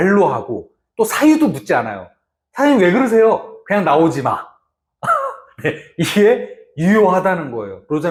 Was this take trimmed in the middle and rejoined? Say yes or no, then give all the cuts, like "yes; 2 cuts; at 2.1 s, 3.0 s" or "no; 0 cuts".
no; 0 cuts